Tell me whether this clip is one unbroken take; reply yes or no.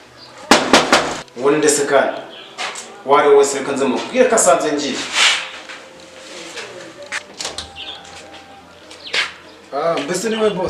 yes